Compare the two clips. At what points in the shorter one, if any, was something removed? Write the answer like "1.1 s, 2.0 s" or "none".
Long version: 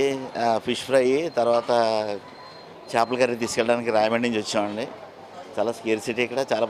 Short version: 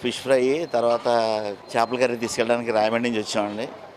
1.6 s